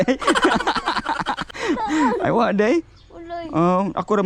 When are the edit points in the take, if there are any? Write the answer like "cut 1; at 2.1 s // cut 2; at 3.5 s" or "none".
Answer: none